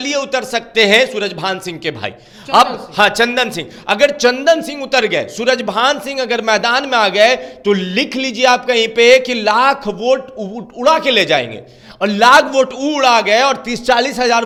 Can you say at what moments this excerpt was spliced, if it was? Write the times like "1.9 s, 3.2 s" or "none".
none